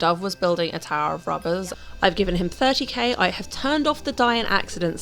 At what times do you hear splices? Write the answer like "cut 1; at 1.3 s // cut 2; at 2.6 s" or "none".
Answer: cut 1; at 1.8 s